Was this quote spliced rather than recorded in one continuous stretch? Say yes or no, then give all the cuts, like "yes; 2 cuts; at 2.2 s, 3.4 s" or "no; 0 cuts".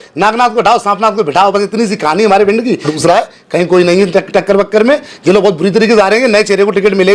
yes; 1 cut; at 2.9 s